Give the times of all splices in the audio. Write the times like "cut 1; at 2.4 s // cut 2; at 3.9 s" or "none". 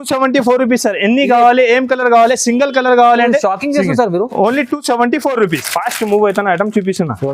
cut 1; at 5.6 s